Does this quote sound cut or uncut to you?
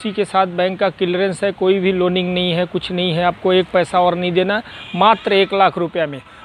uncut